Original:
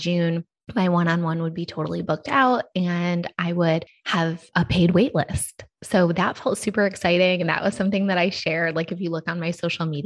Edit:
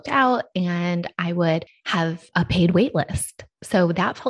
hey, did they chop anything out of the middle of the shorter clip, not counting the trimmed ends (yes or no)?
no